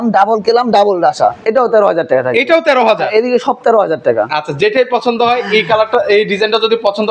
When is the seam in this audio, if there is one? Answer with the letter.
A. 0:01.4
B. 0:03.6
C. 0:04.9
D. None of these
A